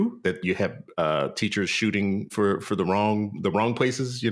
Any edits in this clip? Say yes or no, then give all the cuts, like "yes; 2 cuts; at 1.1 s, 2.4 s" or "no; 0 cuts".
yes; 1 cut; at 2.3 s